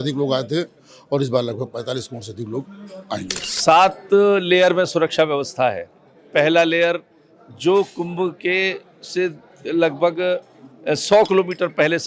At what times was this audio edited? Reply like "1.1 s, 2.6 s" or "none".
3.4 s